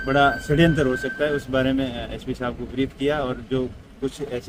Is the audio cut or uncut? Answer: uncut